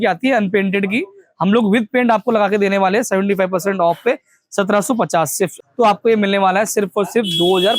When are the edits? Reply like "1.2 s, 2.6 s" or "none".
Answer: 5.5 s